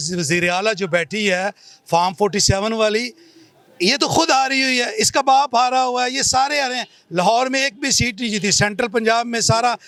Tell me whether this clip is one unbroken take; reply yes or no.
yes